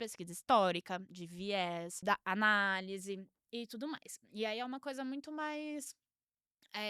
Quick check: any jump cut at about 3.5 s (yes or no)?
no